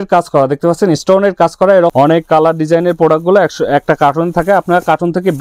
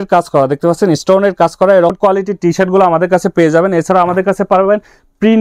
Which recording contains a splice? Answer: first; 1 cut; at 1.9 s

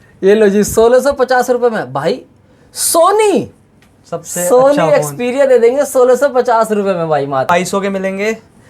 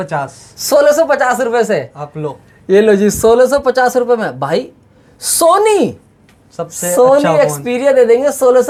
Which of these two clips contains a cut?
first; 1 cut; at 7.5 s

